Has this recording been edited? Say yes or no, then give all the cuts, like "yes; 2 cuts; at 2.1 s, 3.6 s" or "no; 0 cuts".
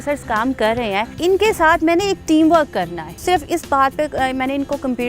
yes; 2 cuts; at 1.1 s, 3.1 s